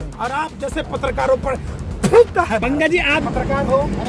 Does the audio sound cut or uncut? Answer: cut